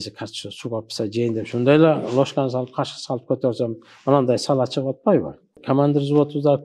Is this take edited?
yes; 1 cut; at 5.5 s

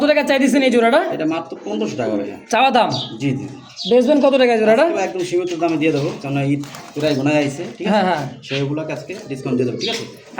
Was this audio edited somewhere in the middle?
no; 0 cuts

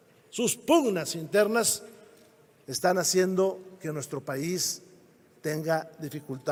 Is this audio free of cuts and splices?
yes; 0 cuts

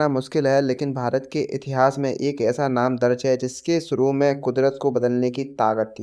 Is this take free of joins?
yes; 0 cuts

